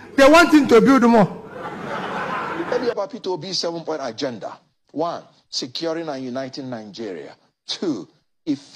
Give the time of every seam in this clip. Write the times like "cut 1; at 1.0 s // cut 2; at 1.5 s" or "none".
cut 1; at 2.7 s